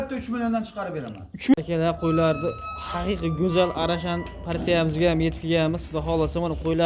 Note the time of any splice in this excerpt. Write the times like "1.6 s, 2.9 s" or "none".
1.5 s